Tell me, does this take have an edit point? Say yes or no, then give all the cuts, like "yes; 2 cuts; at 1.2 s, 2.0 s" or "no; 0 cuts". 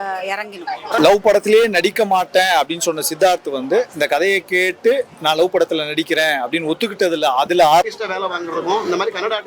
yes; 2 cuts; at 1.0 s, 7.8 s